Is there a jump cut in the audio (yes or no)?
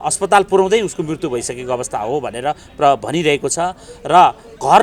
no